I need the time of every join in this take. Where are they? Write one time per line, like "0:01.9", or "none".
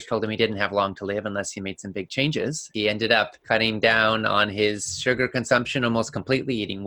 0:02.6
0:03.4